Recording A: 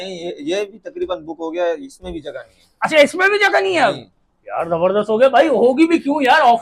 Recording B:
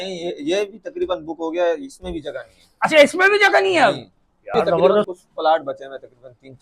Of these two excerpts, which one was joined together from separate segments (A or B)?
B